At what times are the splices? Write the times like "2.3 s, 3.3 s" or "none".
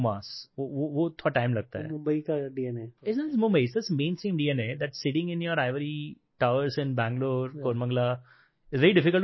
2.9 s